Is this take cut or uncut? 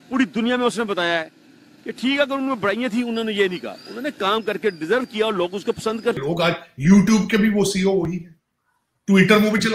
cut